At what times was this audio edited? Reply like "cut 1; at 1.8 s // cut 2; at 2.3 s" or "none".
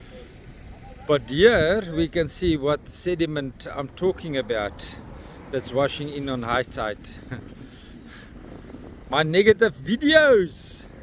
none